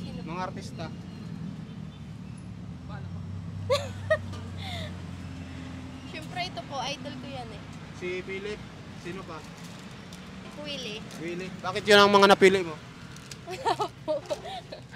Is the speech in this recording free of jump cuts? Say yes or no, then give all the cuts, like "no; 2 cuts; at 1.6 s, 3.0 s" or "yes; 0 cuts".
yes; 0 cuts